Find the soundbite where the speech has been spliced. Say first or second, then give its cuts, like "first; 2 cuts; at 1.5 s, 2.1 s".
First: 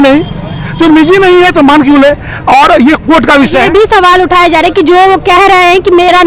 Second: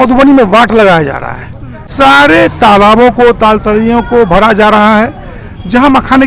second; 1 cut; at 1.9 s